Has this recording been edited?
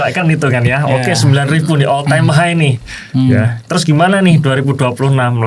no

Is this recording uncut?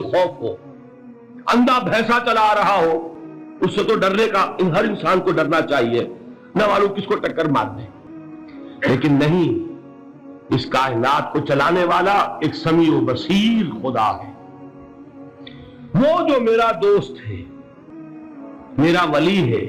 no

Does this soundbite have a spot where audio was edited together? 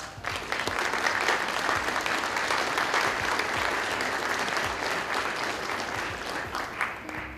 yes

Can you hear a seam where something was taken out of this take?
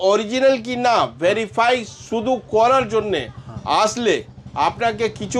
no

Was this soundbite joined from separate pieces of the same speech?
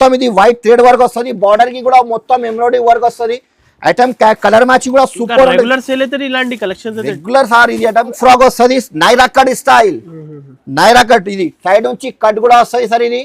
yes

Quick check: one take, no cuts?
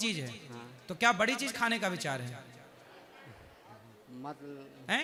yes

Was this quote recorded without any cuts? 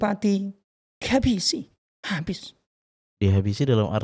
yes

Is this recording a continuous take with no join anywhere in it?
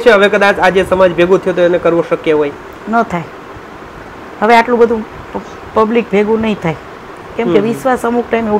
yes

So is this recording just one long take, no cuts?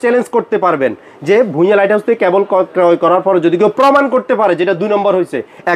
yes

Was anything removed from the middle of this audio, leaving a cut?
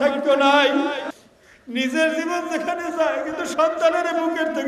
yes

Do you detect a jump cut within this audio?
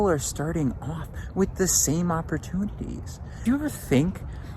yes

